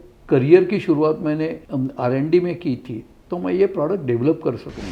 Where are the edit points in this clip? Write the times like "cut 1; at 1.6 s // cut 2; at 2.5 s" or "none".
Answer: cut 1; at 1.6 s